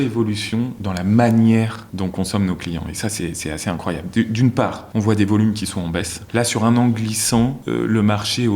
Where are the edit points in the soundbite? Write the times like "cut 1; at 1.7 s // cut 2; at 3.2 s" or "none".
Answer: cut 1; at 1.8 s // cut 2; at 4.8 s // cut 3; at 6.1 s // cut 4; at 7.6 s

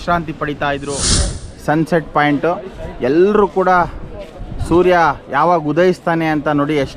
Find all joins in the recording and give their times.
cut 1; at 1.4 s

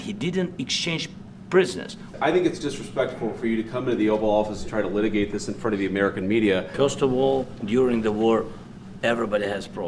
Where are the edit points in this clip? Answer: cut 1; at 2.1 s // cut 2; at 6.7 s

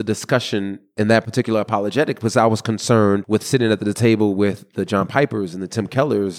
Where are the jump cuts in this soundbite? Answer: cut 1; at 0.9 s // cut 2; at 3.2 s

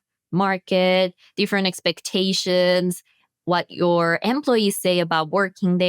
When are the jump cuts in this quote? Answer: none

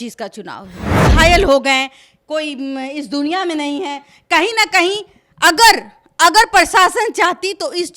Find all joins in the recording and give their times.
cut 1; at 0.9 s

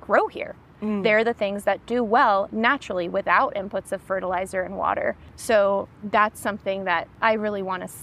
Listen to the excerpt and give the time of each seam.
cut 1; at 5.3 s // cut 2; at 6.0 s // cut 3; at 7.1 s

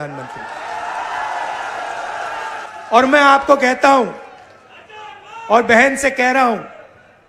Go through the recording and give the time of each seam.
cut 1; at 2.6 s

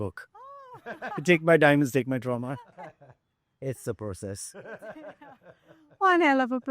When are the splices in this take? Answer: cut 1; at 2.6 s

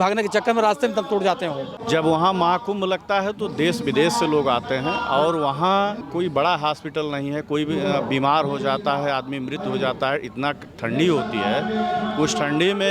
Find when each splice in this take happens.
cut 1; at 1.8 s // cut 2; at 6.0 s

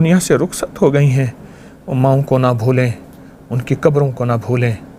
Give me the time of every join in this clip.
none

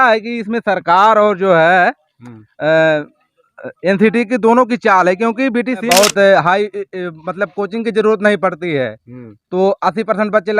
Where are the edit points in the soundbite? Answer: cut 1; at 5.8 s

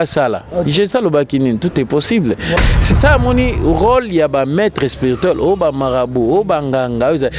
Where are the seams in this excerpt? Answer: cut 1; at 2.6 s

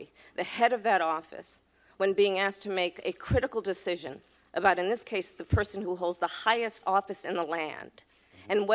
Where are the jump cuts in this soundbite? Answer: none

